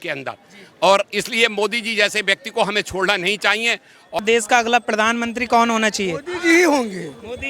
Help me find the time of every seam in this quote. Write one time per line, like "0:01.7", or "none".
0:04.2